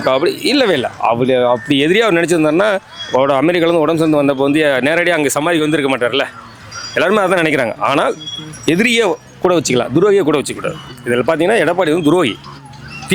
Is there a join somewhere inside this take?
no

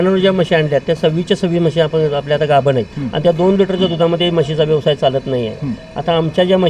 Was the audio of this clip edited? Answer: yes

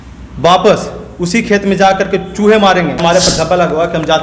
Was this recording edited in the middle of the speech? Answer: yes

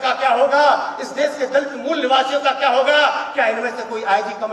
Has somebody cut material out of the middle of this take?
no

